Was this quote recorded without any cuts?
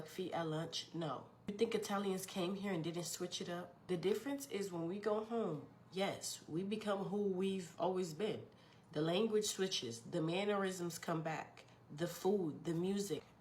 yes; 0 cuts

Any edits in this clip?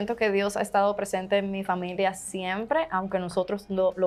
no; 0 cuts

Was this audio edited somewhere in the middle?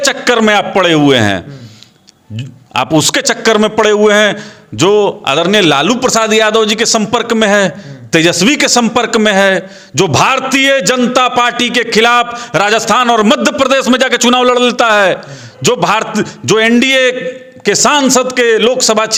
no; 0 cuts

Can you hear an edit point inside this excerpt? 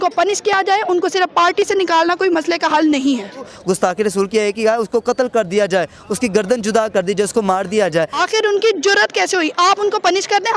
yes; 2 cuts; at 3.5 s, 8.2 s

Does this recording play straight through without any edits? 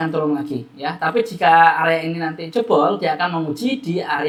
yes; 0 cuts

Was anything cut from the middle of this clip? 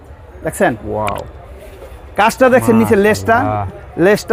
no; 0 cuts

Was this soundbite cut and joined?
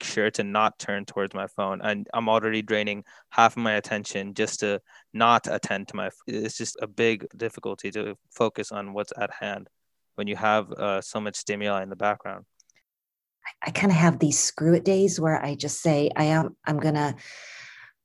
yes; 1 cut; at 13.1 s

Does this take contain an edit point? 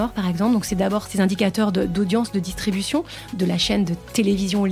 yes; 1 cut; at 1.1 s

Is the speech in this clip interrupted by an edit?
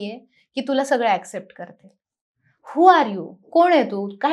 no; 0 cuts

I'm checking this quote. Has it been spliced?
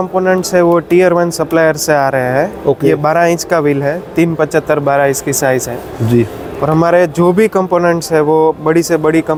no; 0 cuts

